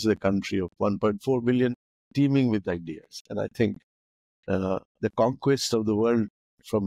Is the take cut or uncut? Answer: uncut